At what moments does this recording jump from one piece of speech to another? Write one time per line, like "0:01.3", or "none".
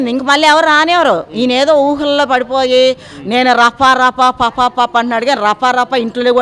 none